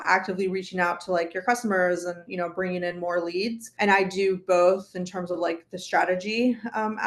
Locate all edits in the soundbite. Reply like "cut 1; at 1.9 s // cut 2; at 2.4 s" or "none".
cut 1; at 3.7 s